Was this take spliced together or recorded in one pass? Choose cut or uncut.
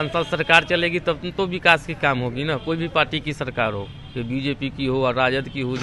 uncut